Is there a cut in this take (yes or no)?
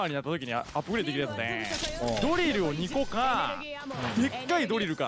no